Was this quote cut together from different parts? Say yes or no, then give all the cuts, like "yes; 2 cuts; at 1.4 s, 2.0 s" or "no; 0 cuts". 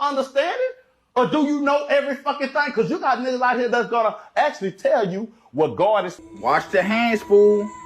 yes; 1 cut; at 6.2 s